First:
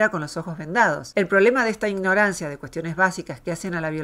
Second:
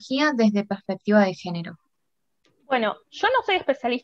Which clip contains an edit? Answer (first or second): first